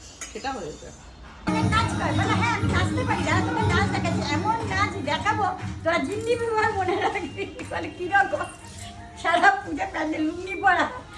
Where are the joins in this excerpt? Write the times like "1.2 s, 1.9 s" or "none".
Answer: 1.5 s